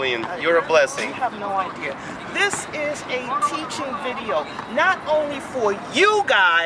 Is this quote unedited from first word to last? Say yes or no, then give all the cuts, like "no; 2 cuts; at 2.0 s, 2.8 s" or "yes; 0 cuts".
yes; 0 cuts